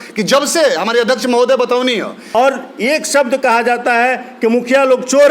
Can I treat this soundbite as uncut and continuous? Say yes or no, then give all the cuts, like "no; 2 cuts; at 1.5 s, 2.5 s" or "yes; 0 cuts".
no; 1 cut; at 2.3 s